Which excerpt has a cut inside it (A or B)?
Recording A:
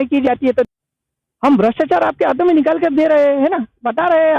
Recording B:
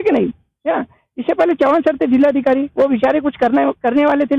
A